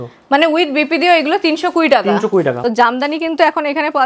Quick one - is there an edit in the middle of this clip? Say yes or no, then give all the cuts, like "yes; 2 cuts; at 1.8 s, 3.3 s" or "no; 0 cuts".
yes; 1 cut; at 2.6 s